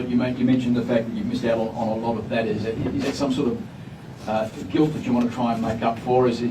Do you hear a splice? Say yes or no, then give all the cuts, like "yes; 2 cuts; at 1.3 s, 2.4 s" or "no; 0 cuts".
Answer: no; 0 cuts